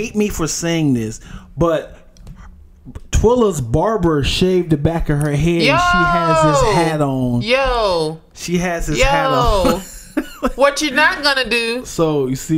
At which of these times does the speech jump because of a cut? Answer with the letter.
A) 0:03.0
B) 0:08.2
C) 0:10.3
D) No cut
D